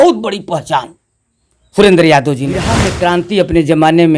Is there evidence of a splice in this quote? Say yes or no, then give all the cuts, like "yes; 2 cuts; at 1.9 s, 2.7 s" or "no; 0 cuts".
yes; 1 cut; at 2.8 s